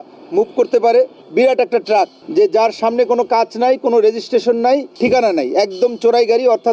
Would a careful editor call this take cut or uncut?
cut